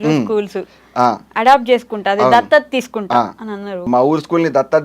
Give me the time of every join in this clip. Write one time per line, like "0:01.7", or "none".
0:03.9